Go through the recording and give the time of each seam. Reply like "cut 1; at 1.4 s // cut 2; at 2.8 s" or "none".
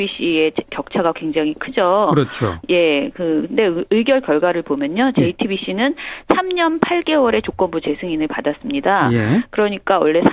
none

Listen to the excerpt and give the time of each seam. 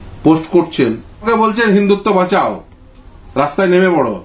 cut 1; at 1.3 s

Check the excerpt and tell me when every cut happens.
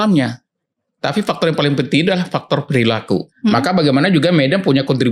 cut 1; at 3.3 s

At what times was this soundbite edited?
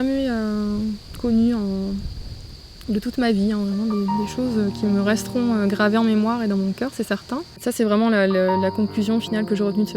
cut 1; at 7.6 s

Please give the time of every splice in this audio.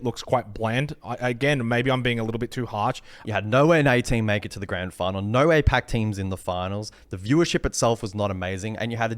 cut 1; at 3.1 s

